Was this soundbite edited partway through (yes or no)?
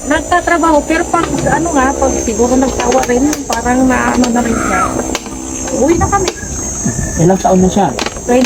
no